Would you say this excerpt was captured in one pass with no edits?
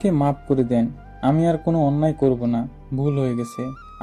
yes; 0 cuts

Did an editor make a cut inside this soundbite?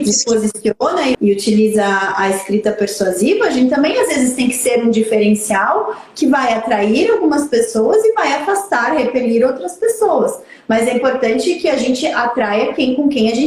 yes; 1 cut; at 1.1 s

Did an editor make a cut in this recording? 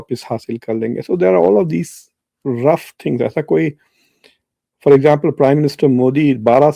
no; 0 cuts

